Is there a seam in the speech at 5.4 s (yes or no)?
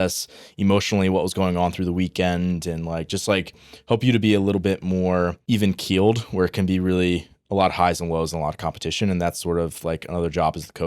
yes